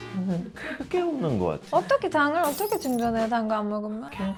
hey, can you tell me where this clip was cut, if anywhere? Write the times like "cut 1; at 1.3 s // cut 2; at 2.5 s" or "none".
none